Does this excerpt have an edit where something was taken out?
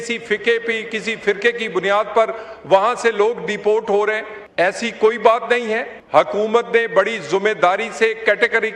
yes; 2 cuts; at 4.3 s, 5.9 s

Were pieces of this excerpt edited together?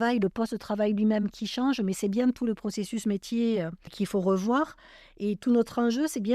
yes; 1 cut; at 3.8 s

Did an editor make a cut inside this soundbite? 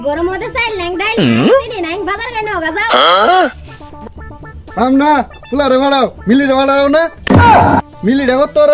no; 0 cuts

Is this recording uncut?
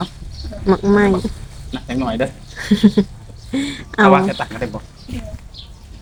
yes; 0 cuts

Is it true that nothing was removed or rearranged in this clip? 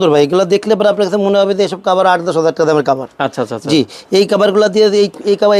yes; 0 cuts

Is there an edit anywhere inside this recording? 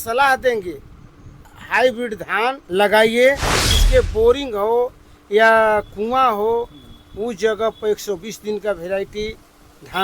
yes; 3 cuts; at 1.6 s, 2.6 s, 3.7 s

